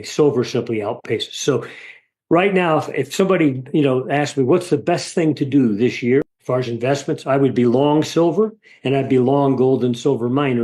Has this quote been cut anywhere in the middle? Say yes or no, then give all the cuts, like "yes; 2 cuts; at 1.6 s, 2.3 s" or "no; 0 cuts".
yes; 1 cut; at 6.4 s